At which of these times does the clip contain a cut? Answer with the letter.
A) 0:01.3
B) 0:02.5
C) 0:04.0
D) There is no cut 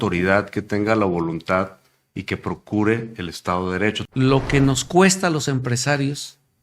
C